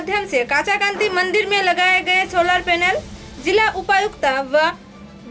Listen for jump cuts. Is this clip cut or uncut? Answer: uncut